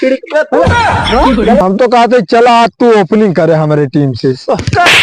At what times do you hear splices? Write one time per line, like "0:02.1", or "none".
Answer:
0:01.6